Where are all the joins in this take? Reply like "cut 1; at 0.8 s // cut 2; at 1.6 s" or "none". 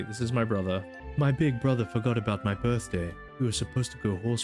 cut 1; at 1.0 s // cut 2; at 3.2 s